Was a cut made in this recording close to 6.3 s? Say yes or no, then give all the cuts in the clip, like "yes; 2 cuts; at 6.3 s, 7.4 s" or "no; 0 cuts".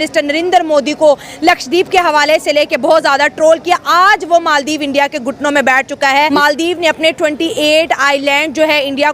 yes; 1 cut; at 6.3 s